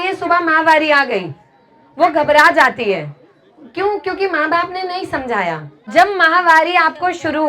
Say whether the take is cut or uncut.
cut